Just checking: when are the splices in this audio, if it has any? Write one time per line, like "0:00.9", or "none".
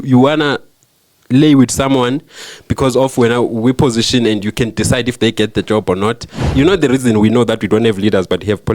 0:06.4